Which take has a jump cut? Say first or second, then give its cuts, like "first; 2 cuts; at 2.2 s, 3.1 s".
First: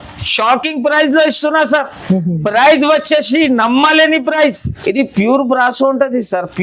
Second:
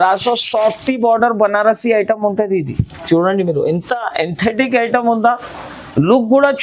first; 1 cut; at 4.7 s